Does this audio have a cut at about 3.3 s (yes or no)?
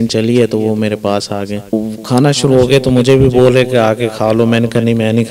no